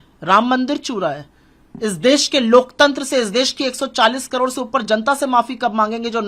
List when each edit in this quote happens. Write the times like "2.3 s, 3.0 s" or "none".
none